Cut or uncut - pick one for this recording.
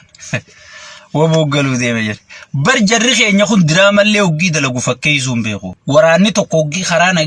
cut